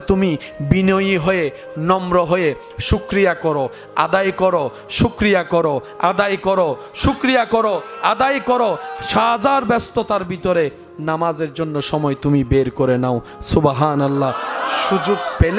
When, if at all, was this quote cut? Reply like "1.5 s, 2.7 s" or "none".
none

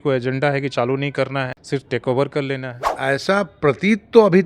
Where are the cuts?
1.6 s, 2.8 s

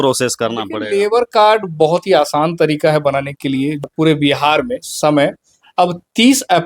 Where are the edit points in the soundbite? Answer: 3.9 s

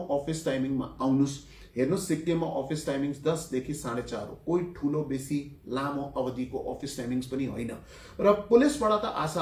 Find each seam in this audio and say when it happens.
none

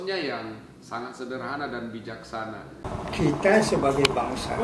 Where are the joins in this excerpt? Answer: 2.7 s

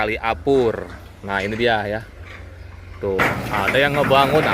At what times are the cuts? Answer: 3.2 s

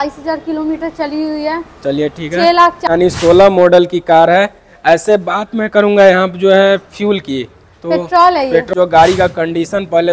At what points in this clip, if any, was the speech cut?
2.9 s, 8.7 s

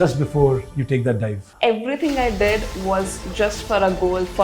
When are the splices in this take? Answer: 1.5 s

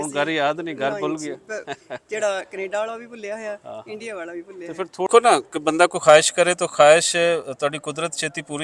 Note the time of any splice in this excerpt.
5.1 s

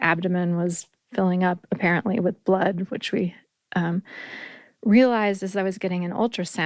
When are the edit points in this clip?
none

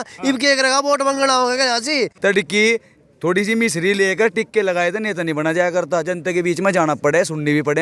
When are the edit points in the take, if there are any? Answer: 2.1 s

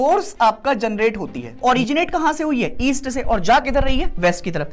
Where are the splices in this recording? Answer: 1.6 s

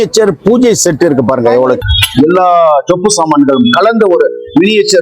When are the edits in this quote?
1.8 s

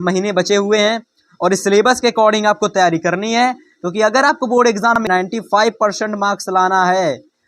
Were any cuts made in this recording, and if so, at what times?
5.0 s

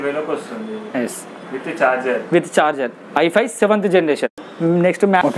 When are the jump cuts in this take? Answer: 4.4 s

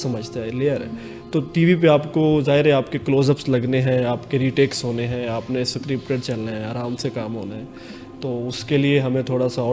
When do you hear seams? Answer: none

